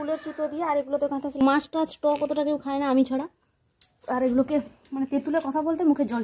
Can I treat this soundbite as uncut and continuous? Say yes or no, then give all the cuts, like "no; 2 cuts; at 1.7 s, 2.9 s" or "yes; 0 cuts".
no; 1 cut; at 1.4 s